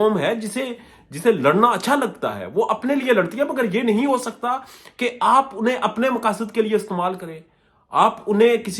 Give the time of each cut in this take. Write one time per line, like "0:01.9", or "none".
none